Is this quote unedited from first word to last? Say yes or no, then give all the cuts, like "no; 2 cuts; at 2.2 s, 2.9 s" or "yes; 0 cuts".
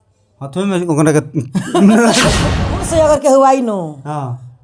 no; 1 cut; at 2.8 s